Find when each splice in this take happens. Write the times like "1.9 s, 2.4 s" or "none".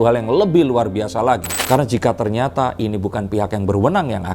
1.5 s